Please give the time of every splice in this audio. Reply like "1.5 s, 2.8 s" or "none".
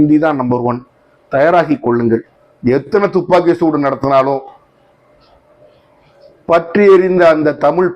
2.3 s